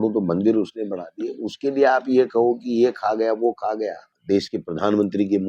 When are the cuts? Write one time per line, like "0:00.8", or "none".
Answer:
0:04.2